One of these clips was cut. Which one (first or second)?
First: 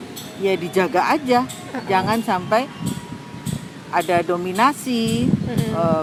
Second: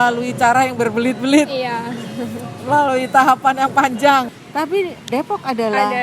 second